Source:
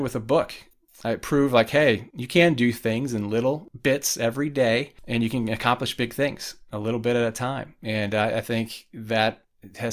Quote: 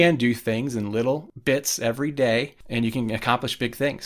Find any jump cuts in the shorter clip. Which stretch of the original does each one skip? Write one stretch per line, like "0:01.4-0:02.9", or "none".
none